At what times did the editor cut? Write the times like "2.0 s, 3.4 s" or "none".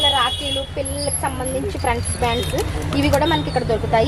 none